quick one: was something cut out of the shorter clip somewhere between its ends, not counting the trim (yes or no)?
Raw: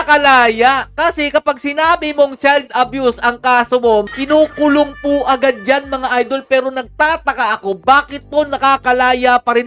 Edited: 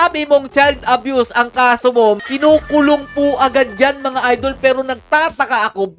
no